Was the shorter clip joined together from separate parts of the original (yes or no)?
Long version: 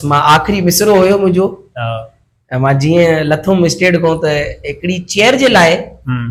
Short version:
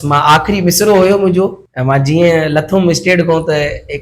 yes